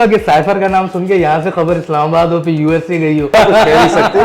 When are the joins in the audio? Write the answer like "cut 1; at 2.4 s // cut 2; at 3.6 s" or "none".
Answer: cut 1; at 3.3 s